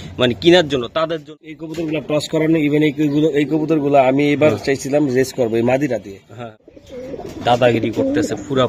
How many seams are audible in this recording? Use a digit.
2